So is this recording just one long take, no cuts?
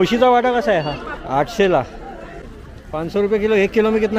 no; 2 cuts; at 1.1 s, 2.4 s

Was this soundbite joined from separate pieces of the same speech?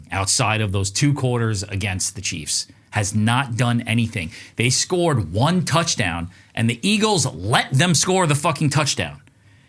no; 0 cuts

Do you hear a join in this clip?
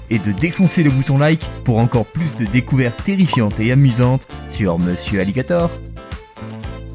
yes; 1 cut; at 5.7 s

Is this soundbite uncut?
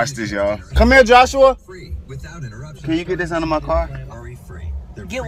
yes; 0 cuts

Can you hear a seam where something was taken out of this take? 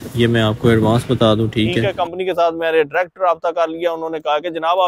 yes; 1 cut; at 1.8 s

